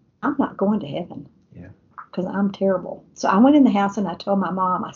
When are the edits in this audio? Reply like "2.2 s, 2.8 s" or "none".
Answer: none